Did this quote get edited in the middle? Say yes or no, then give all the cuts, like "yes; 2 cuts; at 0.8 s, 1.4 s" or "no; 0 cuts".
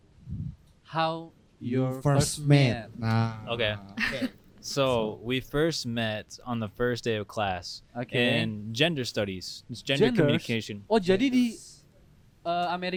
no; 0 cuts